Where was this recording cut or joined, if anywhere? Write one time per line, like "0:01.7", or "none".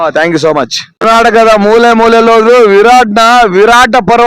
0:01.0